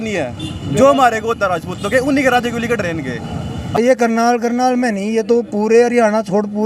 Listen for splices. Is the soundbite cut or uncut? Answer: cut